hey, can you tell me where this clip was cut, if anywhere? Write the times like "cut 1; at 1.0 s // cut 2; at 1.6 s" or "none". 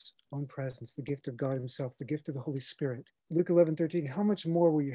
cut 1; at 3.1 s